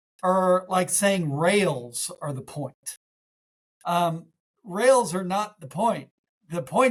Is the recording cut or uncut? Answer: uncut